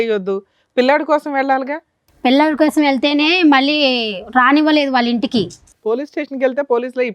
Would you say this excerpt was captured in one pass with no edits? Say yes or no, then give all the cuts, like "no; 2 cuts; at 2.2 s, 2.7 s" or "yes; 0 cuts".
yes; 0 cuts